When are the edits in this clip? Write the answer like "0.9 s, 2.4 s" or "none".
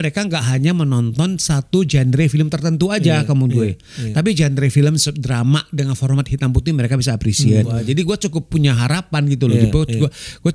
7.8 s

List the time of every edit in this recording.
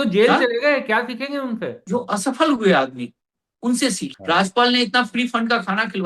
1.8 s, 4.1 s

